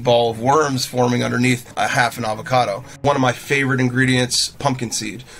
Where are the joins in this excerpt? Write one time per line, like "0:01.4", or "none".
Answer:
0:01.7
0:03.0
0:04.5